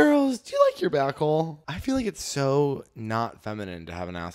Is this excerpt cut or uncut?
cut